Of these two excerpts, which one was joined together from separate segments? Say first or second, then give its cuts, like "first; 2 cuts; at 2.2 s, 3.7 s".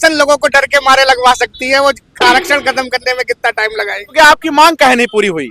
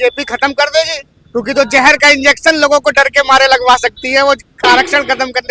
first; 1 cut; at 4.1 s